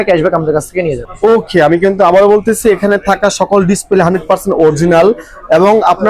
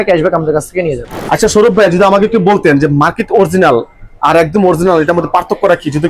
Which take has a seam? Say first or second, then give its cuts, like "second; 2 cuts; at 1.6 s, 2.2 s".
second; 1 cut; at 1.1 s